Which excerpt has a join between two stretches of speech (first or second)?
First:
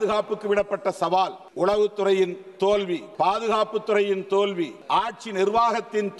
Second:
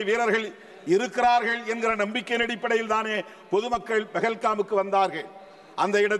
first